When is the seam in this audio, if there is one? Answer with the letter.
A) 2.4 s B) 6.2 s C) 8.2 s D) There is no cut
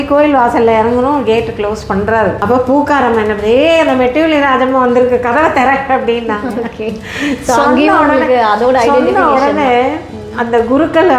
A